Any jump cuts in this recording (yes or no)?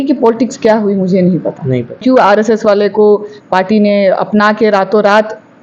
yes